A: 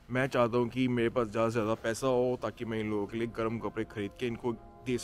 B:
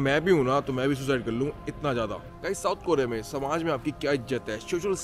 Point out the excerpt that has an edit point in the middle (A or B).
B